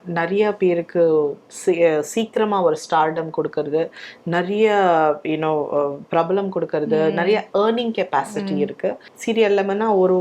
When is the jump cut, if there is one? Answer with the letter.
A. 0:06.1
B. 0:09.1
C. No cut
B